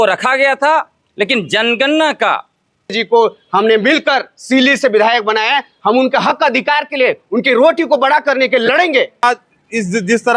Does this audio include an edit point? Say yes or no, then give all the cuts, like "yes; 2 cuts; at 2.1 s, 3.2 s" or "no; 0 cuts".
yes; 2 cuts; at 3.0 s, 9.2 s